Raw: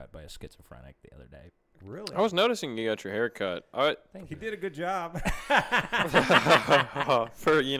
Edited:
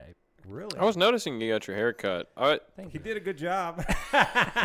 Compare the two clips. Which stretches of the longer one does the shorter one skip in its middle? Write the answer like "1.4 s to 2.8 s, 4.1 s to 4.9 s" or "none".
none